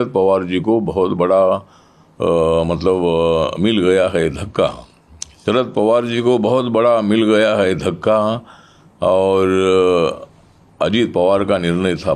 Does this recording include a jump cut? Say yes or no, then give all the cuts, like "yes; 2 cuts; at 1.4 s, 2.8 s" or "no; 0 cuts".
no; 0 cuts